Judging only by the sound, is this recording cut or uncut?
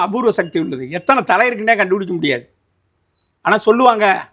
uncut